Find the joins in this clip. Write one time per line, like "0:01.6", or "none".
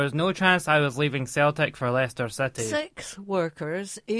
0:02.7

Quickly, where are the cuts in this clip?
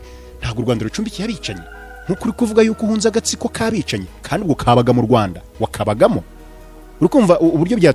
none

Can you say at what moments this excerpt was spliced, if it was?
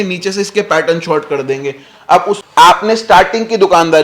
0:02.4

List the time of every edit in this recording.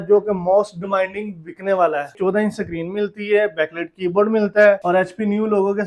0:02.1
0:04.8

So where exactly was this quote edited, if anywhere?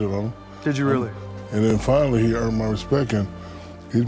0:01.2

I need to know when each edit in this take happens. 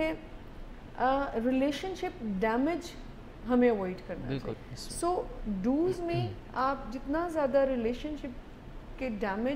0:04.5

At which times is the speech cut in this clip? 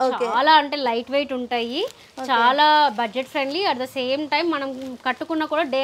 none

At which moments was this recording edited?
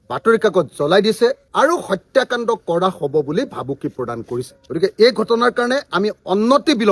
0:01.4
0:04.5

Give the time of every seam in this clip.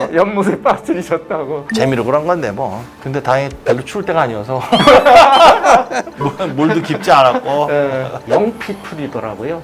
0:01.7
0:08.4

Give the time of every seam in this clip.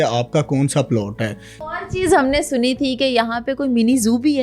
0:01.6

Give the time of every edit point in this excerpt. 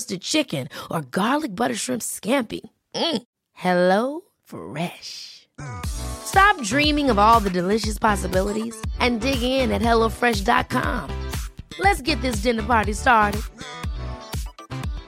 none

